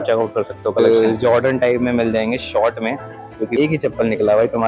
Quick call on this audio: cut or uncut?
cut